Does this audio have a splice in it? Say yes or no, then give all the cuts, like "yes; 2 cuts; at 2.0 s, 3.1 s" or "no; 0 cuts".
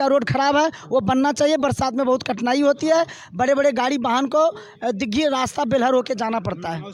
no; 0 cuts